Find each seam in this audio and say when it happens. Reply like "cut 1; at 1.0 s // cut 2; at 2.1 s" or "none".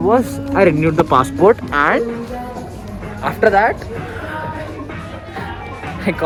none